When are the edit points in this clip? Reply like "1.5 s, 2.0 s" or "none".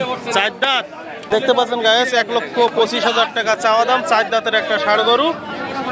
1.3 s